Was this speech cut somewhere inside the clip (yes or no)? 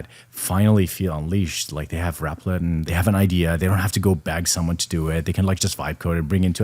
no